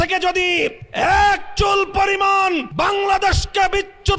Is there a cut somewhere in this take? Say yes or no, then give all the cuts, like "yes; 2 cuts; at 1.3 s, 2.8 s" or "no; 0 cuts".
yes; 2 cuts; at 0.8 s, 2.7 s